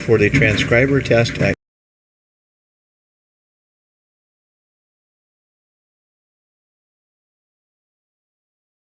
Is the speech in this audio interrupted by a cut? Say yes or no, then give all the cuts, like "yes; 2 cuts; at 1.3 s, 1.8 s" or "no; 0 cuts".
no; 0 cuts